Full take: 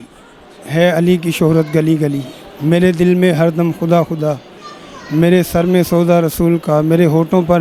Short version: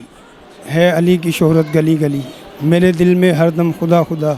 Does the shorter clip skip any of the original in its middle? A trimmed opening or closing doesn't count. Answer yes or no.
no